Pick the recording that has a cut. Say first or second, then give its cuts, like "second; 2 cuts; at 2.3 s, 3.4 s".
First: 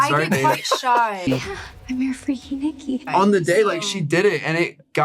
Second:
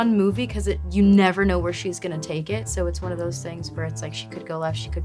first; 2 cuts; at 1.2 s, 3.1 s